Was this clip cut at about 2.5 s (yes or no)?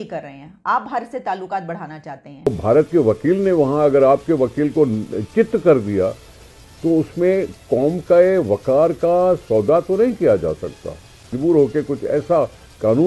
yes